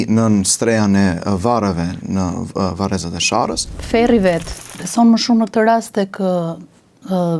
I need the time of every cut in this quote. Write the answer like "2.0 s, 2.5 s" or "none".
3.7 s, 4.5 s